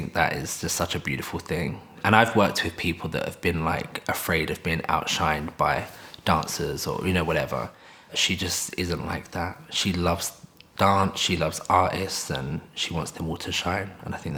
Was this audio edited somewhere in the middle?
no; 0 cuts

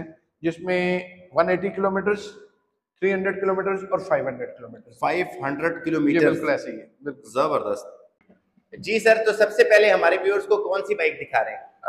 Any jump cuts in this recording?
no; 0 cuts

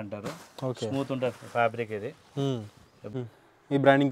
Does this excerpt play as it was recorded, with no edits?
no; 1 cut; at 3.1 s

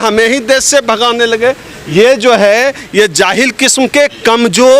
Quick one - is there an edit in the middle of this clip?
no; 0 cuts

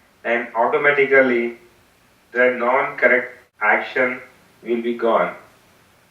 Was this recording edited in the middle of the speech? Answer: yes; 1 cut; at 3.4 s

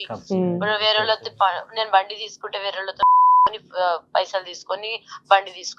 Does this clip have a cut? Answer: no; 0 cuts

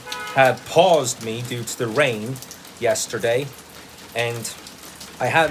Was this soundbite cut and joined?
no; 0 cuts

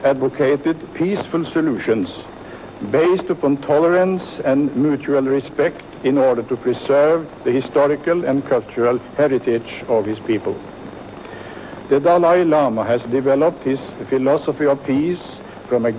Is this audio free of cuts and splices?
no; 1 cut; at 1.7 s

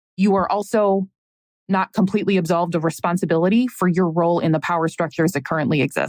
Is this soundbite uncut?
yes; 0 cuts

